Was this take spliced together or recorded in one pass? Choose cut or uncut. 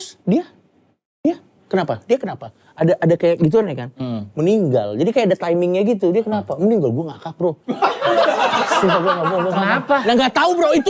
uncut